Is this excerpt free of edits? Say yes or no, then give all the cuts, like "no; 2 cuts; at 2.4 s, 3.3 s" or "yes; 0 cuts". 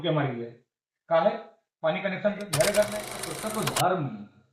no; 1 cut; at 3.3 s